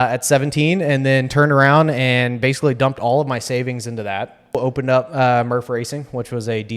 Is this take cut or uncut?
cut